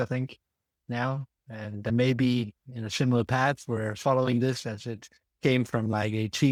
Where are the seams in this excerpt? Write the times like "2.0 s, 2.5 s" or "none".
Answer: none